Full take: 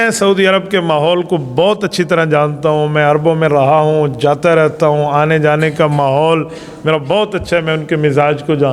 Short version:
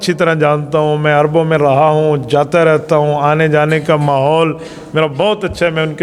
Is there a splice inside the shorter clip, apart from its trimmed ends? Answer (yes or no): no